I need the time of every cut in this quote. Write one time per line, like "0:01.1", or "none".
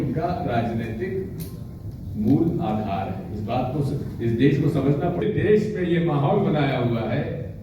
0:05.2